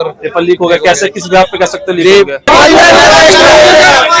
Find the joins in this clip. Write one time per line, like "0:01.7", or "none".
0:02.5